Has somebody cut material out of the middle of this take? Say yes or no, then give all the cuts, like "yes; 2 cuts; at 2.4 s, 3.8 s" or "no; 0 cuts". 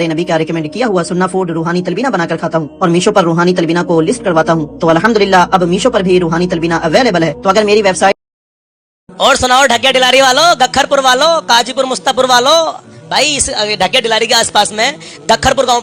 no; 0 cuts